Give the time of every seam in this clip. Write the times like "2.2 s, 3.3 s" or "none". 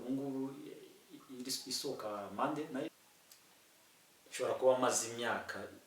2.9 s